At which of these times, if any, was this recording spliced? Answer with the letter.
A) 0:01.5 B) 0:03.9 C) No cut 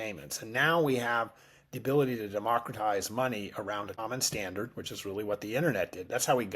B